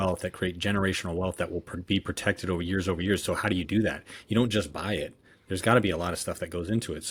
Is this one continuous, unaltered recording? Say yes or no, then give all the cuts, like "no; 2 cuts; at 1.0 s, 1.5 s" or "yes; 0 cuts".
yes; 0 cuts